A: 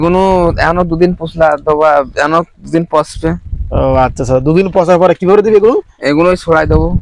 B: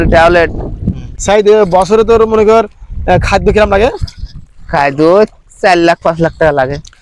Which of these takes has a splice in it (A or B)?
B